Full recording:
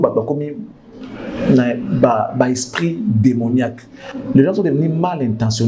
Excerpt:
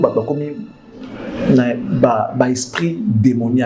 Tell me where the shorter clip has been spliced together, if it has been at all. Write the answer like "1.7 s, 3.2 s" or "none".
none